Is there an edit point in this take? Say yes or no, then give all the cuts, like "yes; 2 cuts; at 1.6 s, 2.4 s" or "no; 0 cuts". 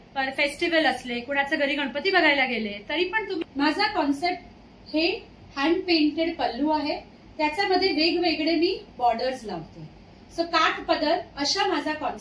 yes; 1 cut; at 3.4 s